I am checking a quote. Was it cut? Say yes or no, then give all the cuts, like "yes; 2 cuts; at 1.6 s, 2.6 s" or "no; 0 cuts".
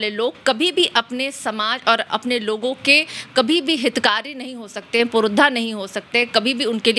no; 0 cuts